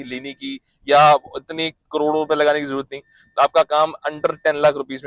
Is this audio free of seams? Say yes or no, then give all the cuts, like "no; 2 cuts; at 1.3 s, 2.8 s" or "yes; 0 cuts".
yes; 0 cuts